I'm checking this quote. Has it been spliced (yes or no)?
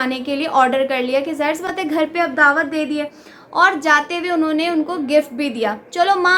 no